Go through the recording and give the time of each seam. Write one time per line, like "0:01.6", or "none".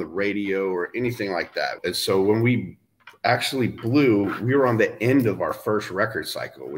0:01.8